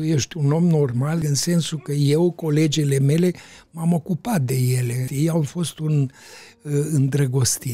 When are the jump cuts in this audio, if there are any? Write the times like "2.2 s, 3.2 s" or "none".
1.2 s, 5.1 s

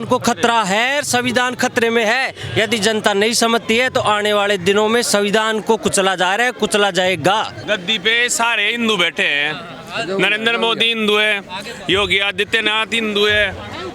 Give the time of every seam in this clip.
7.6 s

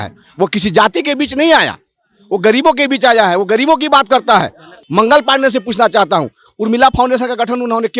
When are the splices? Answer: 4.8 s

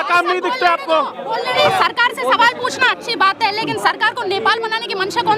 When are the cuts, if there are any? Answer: 1.6 s

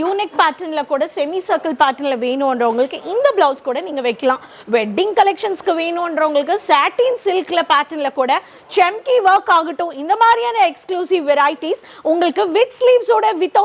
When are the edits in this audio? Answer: none

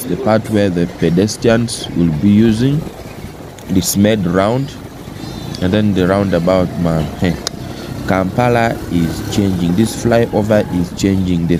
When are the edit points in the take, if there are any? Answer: none

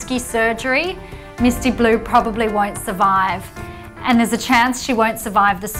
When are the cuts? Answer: none

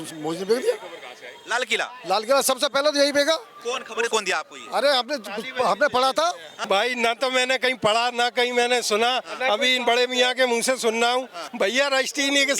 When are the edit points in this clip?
6.5 s, 11.4 s

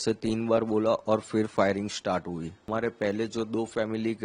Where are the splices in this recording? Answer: 2.7 s

